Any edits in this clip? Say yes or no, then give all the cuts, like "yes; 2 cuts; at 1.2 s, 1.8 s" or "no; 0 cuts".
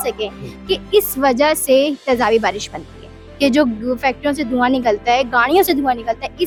no; 0 cuts